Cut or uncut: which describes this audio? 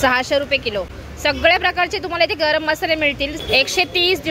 cut